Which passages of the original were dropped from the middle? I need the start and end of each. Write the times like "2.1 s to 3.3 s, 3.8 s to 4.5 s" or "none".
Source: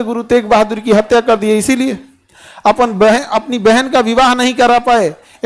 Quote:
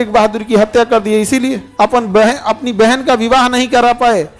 2.0 s to 2.5 s